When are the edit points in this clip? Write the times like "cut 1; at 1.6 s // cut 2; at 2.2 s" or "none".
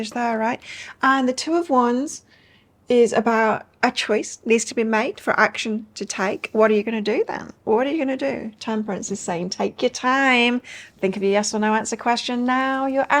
cut 1; at 10.8 s